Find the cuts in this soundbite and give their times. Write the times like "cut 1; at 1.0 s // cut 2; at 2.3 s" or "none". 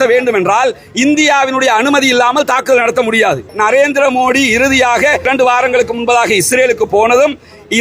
cut 1; at 3.5 s // cut 2; at 5.3 s